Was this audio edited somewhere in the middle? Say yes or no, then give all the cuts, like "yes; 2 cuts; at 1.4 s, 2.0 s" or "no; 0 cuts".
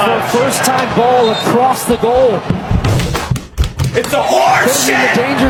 no; 0 cuts